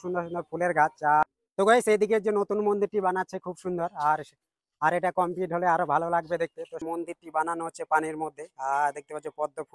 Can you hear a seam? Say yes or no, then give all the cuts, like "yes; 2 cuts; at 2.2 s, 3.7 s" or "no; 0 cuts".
yes; 2 cuts; at 1.2 s, 6.8 s